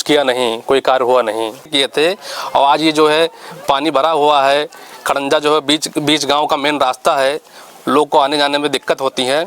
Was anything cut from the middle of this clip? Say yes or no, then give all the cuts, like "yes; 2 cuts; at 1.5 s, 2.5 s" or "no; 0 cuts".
yes; 1 cut; at 1.7 s